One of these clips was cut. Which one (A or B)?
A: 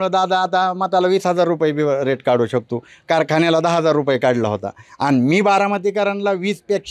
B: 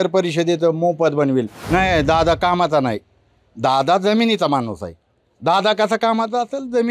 B